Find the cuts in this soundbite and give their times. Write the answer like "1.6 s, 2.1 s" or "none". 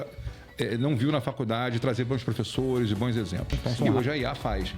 3.8 s

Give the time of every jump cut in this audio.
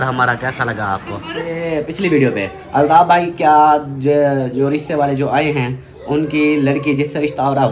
1.5 s

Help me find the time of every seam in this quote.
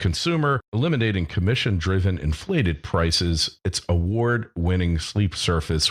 3.7 s

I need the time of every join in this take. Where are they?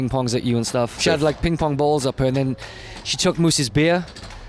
1.0 s

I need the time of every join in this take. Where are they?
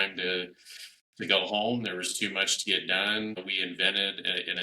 none

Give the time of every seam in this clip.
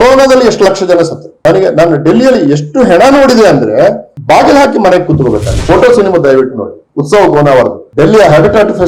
1.3 s, 5.5 s

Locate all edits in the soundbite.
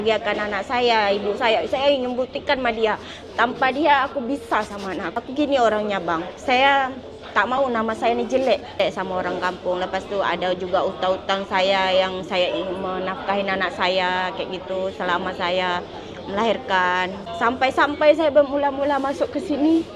5.1 s, 8.8 s, 17.2 s

